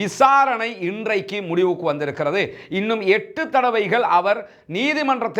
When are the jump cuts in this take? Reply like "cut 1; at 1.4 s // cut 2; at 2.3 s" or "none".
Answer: none